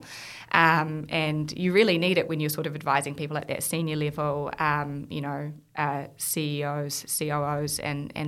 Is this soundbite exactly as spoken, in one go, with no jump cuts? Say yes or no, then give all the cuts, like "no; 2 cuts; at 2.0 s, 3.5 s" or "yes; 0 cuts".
yes; 0 cuts